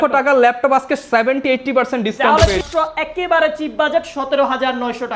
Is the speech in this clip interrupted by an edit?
yes; 1 cut; at 2.6 s

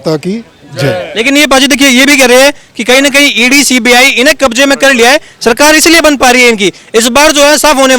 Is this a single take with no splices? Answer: yes; 0 cuts

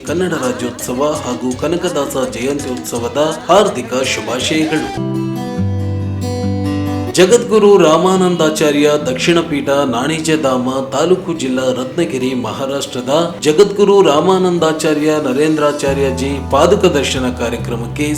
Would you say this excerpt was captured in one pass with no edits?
no; 1 cut; at 5.0 s

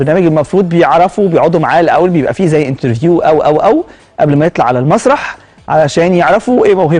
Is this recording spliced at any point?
no; 0 cuts

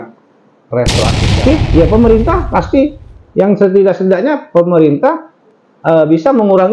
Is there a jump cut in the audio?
yes; 1 cut; at 1.4 s

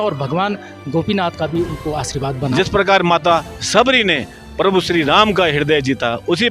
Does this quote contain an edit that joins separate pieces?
yes; 1 cut; at 2.5 s

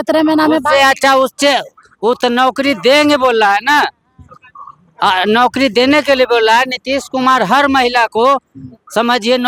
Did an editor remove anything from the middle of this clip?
no; 0 cuts

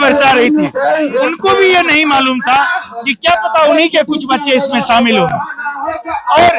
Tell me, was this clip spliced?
no; 0 cuts

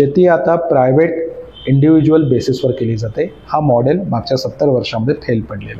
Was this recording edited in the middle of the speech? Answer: no; 0 cuts

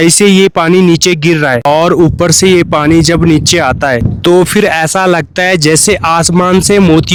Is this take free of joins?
yes; 0 cuts

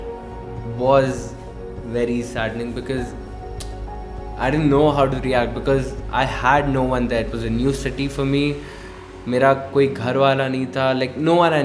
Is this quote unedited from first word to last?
yes; 0 cuts

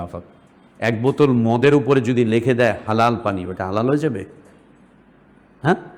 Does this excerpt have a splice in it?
no; 0 cuts

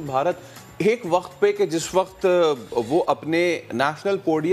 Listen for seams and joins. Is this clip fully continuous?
yes; 0 cuts

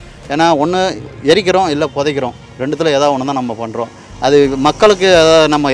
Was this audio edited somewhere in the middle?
no; 0 cuts

